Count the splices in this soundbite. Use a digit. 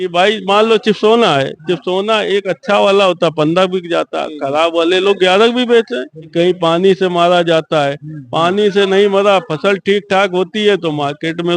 1